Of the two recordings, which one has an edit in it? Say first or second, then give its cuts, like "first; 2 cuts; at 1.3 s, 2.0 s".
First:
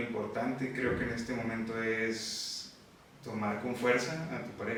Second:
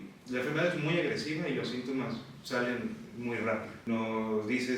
second; 1 cut; at 3.8 s